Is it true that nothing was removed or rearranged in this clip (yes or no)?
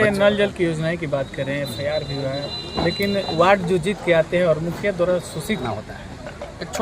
no